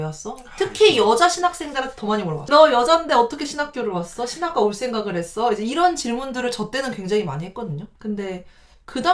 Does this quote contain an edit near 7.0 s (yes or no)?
no